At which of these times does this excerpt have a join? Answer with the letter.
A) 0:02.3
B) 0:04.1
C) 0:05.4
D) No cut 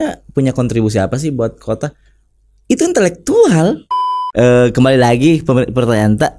B